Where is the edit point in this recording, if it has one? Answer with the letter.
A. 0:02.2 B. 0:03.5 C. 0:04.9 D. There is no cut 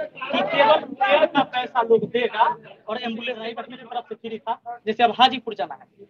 B